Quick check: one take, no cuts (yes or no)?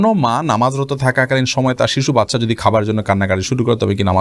yes